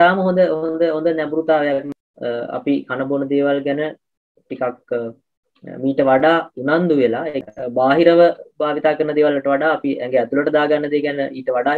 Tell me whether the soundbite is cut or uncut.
cut